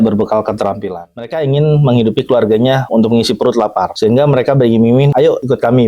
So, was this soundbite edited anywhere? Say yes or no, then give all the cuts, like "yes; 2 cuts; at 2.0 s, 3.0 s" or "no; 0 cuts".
yes; 4 cuts; at 0.9 s, 2.8 s, 3.9 s, 5.2 s